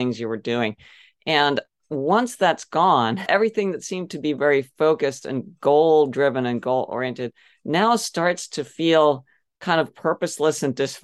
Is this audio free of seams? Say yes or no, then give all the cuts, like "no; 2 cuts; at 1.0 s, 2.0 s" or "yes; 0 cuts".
no; 1 cut; at 3.2 s